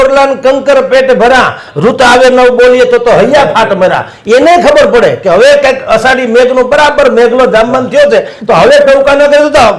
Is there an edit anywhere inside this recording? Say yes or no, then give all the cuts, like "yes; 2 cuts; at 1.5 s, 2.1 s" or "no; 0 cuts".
no; 0 cuts